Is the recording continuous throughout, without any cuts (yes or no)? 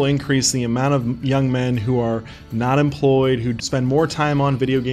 no